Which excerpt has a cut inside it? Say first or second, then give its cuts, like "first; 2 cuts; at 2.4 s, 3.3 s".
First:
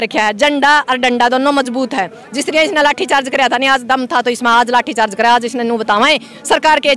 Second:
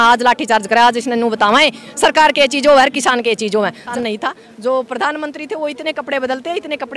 second; 1 cut; at 3.9 s